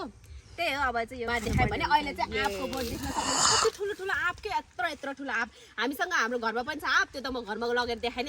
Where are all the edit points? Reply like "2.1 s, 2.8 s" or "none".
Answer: 1.3 s